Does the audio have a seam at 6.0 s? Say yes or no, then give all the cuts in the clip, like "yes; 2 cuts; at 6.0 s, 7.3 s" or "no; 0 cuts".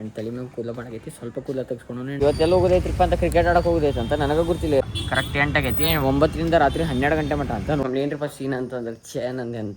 no; 3 cuts; at 2.2 s, 4.8 s, 7.8 s